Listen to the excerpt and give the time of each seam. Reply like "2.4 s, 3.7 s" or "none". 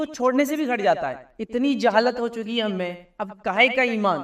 1.3 s

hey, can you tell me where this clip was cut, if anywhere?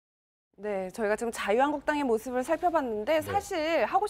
none

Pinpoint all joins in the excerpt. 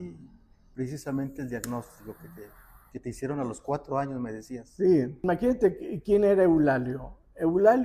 5.2 s

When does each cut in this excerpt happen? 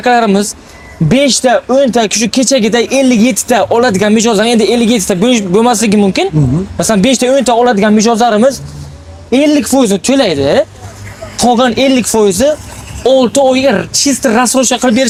none

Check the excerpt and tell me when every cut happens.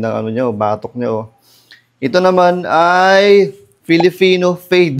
none

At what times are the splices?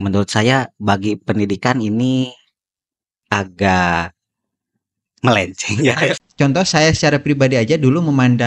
6.2 s

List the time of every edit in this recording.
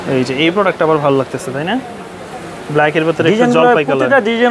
none

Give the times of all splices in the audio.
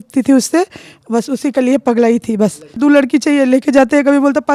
2.8 s

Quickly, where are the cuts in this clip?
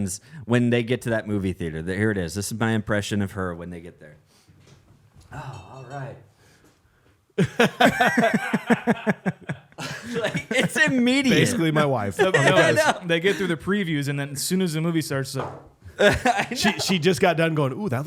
none

